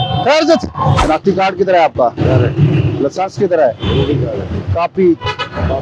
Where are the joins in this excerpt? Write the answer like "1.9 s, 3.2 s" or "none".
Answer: 1.0 s